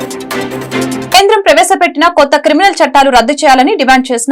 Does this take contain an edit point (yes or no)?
yes